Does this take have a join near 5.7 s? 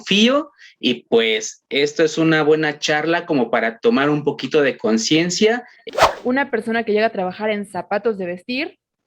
yes; 1 cut; at 5.7 s

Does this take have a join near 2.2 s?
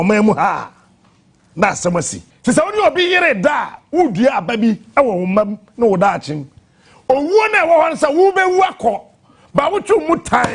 yes; 1 cut; at 2.2 s

